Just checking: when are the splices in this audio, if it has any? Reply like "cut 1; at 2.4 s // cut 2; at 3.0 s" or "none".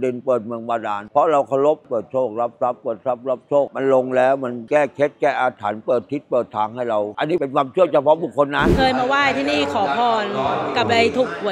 cut 1; at 1.8 s // cut 2; at 3.7 s // cut 3; at 7.2 s // cut 4; at 8.7 s